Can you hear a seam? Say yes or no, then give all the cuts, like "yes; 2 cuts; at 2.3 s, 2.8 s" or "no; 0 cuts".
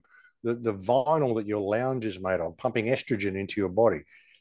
no; 0 cuts